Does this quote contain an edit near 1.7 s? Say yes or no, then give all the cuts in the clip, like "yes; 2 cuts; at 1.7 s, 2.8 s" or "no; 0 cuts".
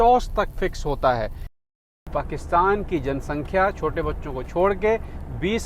yes; 1 cut; at 1.7 s